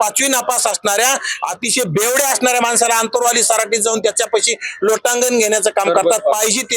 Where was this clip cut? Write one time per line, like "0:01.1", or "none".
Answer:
none